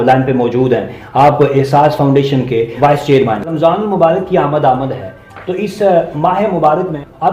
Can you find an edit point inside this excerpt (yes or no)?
yes